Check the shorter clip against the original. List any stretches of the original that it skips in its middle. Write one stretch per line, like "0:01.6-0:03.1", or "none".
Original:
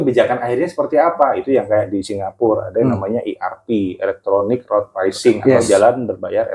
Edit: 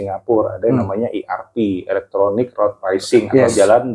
none